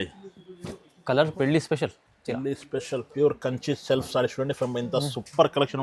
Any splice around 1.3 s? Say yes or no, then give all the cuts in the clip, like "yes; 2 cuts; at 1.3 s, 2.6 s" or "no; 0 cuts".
yes; 1 cut; at 1.3 s